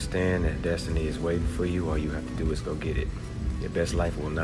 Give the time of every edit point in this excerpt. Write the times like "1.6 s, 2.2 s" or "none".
none